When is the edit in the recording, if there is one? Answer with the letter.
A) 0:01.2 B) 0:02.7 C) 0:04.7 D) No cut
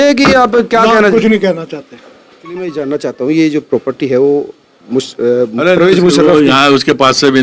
B